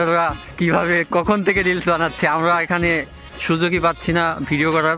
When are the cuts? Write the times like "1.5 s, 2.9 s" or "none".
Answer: none